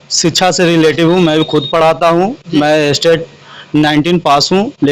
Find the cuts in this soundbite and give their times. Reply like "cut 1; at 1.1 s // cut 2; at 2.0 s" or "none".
none